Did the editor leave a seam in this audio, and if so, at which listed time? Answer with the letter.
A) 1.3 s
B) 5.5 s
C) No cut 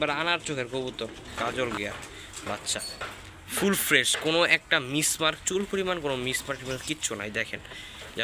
A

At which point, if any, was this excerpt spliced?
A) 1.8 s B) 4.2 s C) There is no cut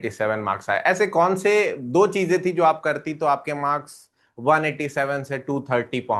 C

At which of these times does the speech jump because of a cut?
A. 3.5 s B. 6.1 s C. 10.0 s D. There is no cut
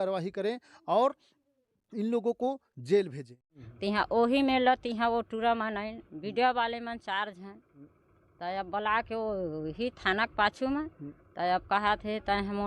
A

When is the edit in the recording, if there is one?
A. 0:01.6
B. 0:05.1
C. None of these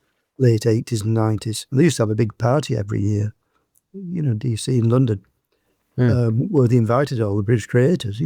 A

